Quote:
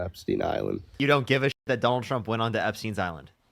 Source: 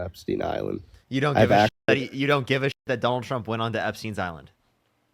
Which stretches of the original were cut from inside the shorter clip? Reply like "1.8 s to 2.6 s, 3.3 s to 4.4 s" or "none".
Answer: 0.9 s to 2.1 s